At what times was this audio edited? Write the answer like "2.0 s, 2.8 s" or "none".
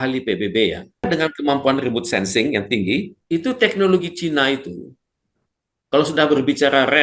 1.1 s, 3.2 s